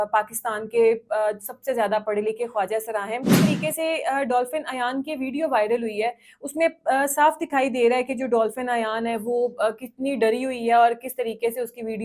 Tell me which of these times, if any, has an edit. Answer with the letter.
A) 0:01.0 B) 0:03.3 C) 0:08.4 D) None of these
B